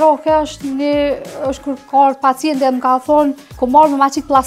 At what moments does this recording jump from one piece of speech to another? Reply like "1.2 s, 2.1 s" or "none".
3.5 s